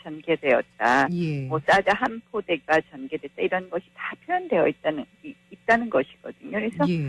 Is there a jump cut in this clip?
yes; 1 cut; at 3.2 s

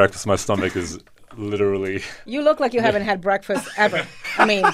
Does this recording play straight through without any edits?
yes; 0 cuts

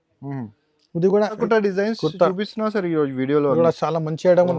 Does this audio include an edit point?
yes; 1 cut; at 1.4 s

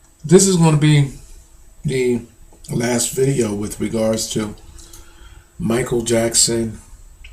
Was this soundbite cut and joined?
no; 0 cuts

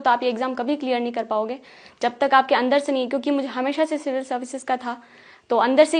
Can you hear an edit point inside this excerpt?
no; 0 cuts

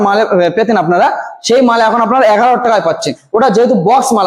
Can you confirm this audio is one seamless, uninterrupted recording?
yes; 0 cuts

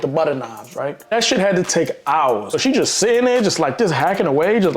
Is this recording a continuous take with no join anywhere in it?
no; 2 cuts; at 1.1 s, 2.5 s

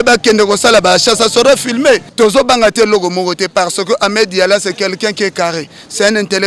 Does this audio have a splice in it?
yes; 1 cut; at 2.1 s

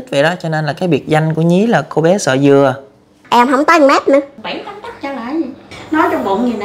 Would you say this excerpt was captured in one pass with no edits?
no; 3 cuts; at 3.2 s, 4.3 s, 5.7 s

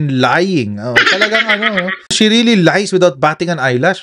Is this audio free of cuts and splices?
no; 1 cut; at 2.1 s

